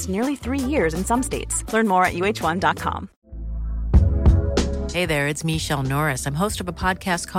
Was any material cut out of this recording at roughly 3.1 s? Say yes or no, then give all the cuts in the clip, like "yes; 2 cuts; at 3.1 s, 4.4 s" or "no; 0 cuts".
yes; 1 cut; at 3.1 s